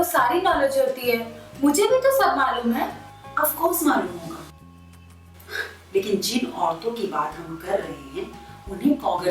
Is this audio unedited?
yes; 0 cuts

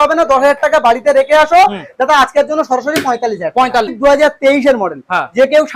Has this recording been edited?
yes; 1 cut; at 3.9 s

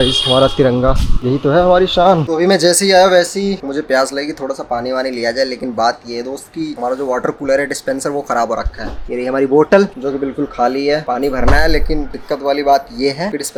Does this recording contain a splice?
no; 0 cuts

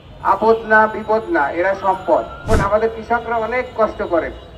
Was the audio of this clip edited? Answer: yes; 1 cut; at 2.5 s

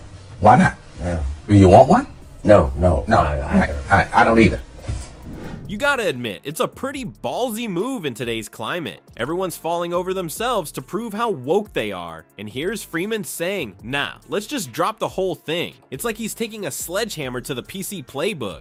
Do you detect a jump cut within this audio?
no; 0 cuts

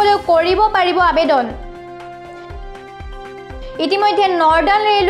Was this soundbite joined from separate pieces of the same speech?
yes; 2 cuts; at 1.6 s, 3.5 s

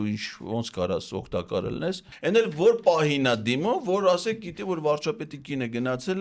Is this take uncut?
no; 1 cut; at 2.1 s

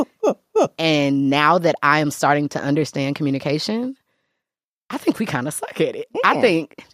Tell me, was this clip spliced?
no; 0 cuts

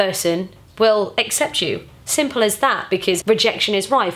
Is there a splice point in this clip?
yes; 1 cut; at 3.2 s

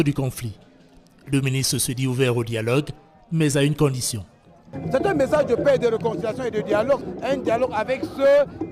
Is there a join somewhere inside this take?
yes; 1 cut; at 3.2 s

